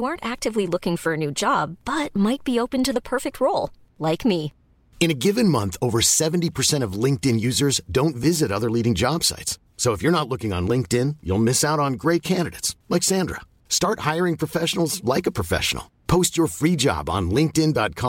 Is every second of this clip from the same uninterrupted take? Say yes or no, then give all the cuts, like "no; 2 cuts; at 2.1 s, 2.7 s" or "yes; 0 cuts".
yes; 0 cuts